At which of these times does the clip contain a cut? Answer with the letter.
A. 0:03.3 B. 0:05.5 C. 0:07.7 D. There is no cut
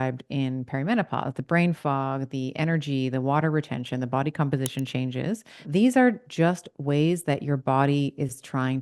B